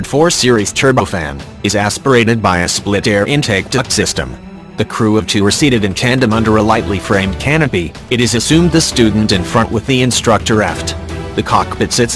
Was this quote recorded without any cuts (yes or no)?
no